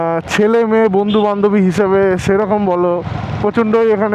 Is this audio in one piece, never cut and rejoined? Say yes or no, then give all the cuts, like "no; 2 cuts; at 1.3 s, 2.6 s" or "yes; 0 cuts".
yes; 0 cuts